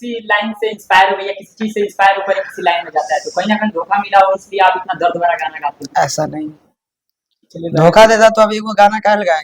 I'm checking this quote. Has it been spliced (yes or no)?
no